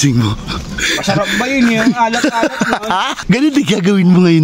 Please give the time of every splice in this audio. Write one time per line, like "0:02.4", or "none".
0:03.2